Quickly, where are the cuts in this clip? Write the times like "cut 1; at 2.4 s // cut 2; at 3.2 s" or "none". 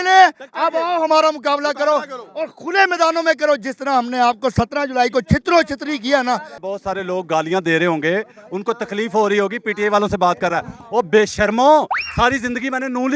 cut 1; at 6.6 s